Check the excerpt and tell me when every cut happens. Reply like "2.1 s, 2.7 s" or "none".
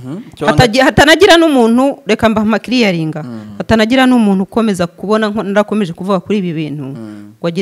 none